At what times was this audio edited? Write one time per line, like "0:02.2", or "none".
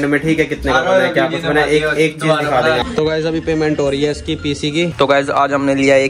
0:02.9
0:04.9